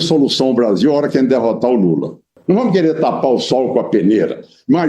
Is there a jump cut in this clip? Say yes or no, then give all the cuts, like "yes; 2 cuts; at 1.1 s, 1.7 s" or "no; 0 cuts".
yes; 1 cut; at 2.3 s